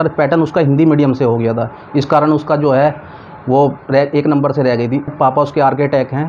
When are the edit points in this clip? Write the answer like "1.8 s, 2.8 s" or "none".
5.1 s